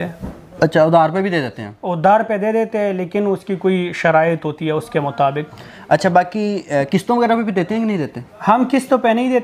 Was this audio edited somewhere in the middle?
no; 0 cuts

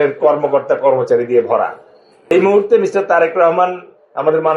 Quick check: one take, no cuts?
yes; 0 cuts

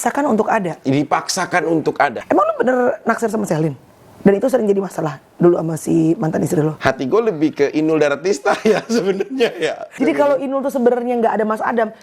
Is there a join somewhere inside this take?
yes; 3 cuts; at 2.2 s, 6.8 s, 9.9 s

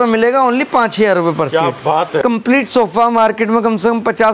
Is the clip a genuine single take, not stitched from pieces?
no; 1 cut; at 2.2 s

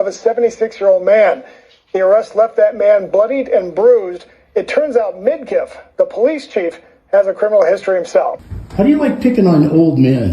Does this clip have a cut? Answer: yes; 1 cut; at 8.4 s

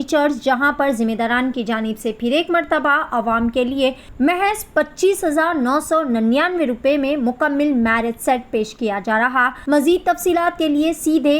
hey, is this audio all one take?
no; 2 cuts; at 4.0 s, 9.5 s

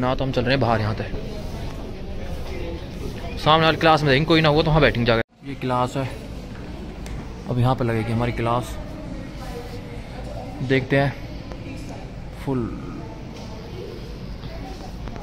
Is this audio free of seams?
yes; 0 cuts

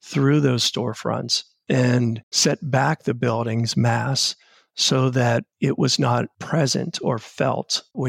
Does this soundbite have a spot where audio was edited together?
no; 0 cuts

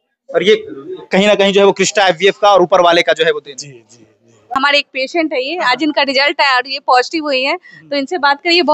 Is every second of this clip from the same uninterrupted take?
no; 1 cut; at 4.5 s

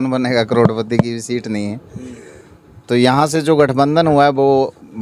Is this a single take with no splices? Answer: yes; 0 cuts

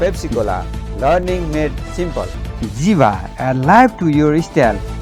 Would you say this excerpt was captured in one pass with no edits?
yes; 0 cuts

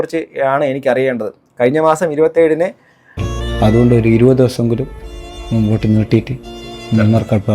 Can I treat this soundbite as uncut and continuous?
no; 1 cut; at 3.2 s

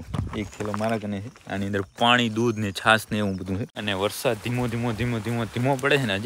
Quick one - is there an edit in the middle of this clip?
yes; 1 cut; at 3.6 s

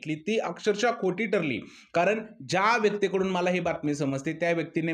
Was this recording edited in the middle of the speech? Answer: no; 0 cuts

